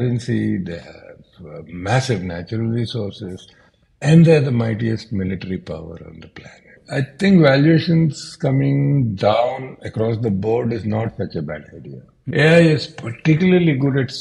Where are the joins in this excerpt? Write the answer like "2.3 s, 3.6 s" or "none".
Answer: 6.8 s, 12.1 s

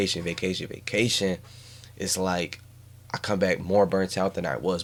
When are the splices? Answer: none

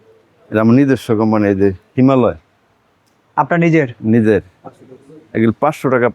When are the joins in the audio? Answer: none

